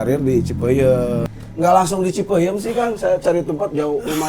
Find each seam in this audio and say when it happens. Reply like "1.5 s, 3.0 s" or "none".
1.3 s